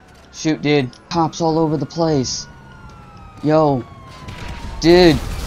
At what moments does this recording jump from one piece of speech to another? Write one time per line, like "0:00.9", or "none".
0:01.0